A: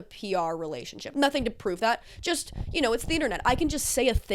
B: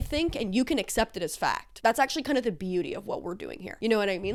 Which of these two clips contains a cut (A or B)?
A